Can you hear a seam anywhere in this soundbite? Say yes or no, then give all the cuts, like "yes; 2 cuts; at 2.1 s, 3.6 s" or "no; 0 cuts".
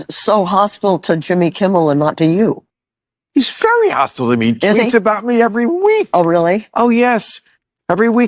no; 0 cuts